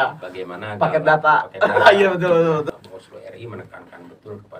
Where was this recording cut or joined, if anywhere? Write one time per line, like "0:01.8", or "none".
0:02.7